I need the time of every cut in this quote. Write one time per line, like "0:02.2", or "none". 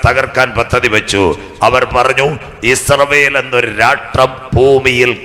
none